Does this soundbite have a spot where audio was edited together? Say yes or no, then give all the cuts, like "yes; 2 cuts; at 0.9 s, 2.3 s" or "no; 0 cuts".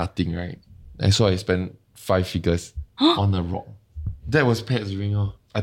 yes; 2 cuts; at 2.8 s, 4.2 s